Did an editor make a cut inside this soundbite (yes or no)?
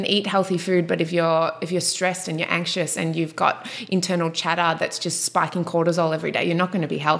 no